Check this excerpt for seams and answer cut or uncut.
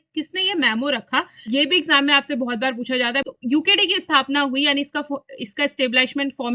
cut